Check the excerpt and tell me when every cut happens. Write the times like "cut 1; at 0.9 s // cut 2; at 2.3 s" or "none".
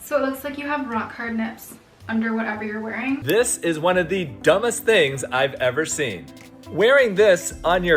cut 1; at 3.2 s